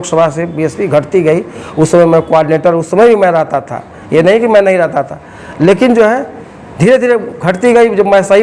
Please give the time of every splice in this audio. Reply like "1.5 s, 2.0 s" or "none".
none

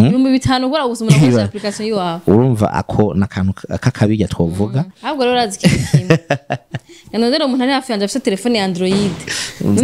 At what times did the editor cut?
5.0 s

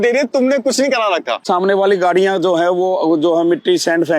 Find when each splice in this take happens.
1.4 s

